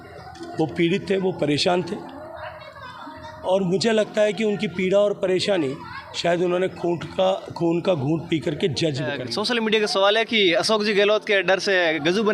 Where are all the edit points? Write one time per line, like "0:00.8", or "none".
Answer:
0:09.2